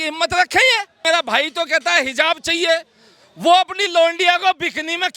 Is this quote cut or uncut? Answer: cut